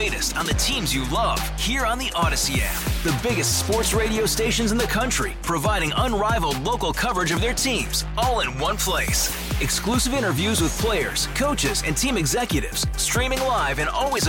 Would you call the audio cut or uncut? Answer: uncut